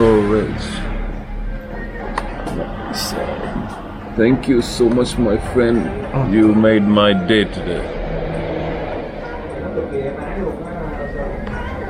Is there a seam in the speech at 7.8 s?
no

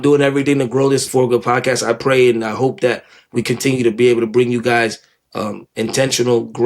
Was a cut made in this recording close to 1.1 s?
yes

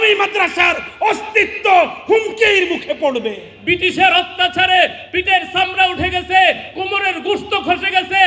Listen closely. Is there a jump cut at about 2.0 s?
no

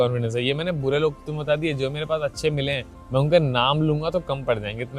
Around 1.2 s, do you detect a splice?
no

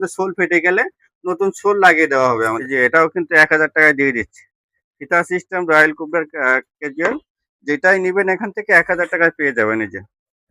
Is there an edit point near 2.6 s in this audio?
yes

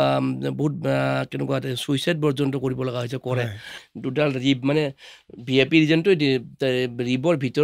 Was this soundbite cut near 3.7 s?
yes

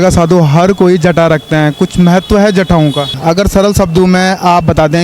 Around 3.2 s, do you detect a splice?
yes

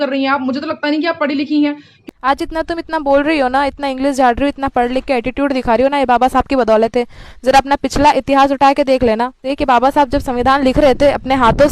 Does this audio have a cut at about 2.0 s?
yes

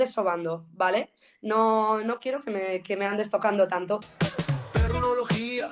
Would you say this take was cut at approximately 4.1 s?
yes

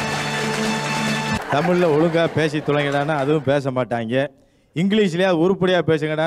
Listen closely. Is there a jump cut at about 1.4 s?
yes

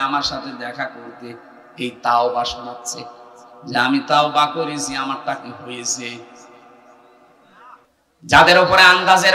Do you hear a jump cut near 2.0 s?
no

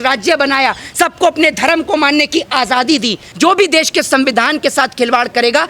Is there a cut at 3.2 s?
yes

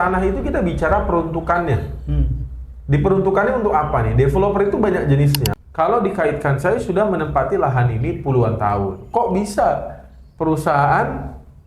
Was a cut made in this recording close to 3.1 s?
no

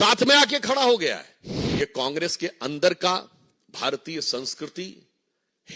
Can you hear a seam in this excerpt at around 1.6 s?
yes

